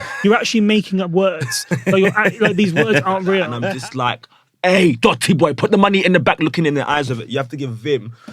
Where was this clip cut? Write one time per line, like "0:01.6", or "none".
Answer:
0:03.6